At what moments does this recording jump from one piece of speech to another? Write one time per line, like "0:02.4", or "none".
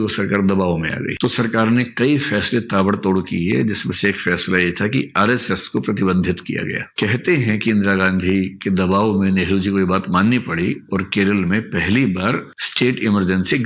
0:01.1
0:06.8